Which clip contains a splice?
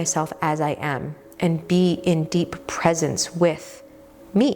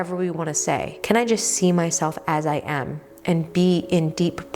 second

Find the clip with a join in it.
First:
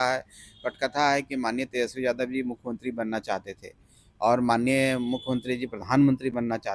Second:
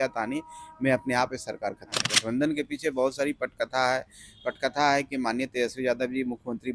second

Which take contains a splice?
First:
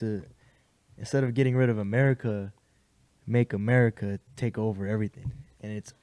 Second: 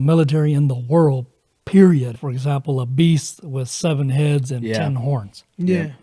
second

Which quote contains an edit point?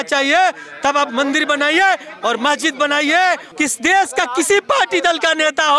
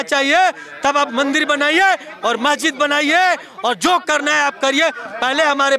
first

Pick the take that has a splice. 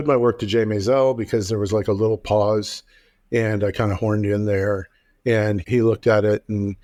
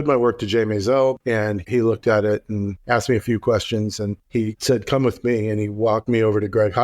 second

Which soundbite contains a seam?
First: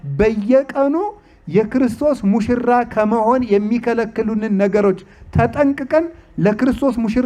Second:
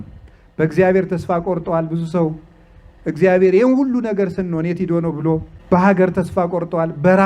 second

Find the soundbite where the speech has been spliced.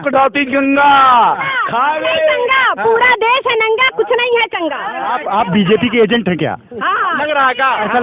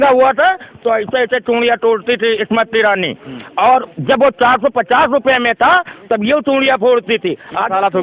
first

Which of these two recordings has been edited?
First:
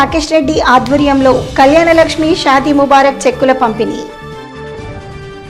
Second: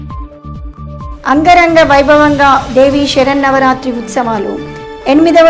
second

